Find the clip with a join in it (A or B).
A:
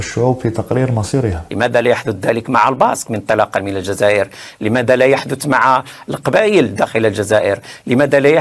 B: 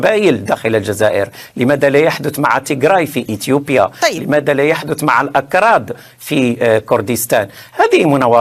A